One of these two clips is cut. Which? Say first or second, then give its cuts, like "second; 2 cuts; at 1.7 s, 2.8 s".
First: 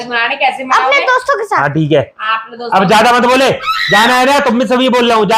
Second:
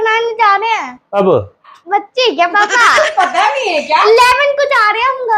second; 2 cuts; at 1.0 s, 1.8 s